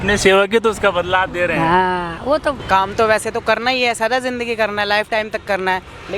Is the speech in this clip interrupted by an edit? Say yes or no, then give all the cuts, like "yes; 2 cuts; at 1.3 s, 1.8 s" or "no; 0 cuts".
yes; 1 cut; at 2.6 s